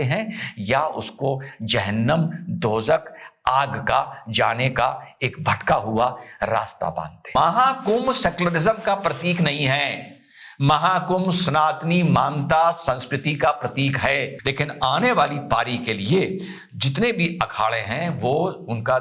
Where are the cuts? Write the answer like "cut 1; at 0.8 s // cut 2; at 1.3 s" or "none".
cut 1; at 7.3 s // cut 2; at 14.3 s